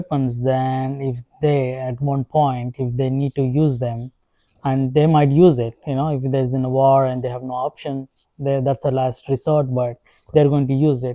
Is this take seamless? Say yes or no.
yes